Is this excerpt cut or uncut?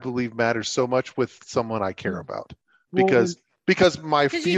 uncut